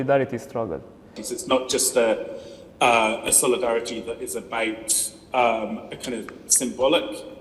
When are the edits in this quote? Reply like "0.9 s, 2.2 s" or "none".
1.2 s